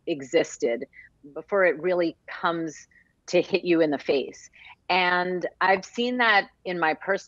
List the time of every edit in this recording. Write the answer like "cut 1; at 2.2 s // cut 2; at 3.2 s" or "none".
cut 1; at 1.0 s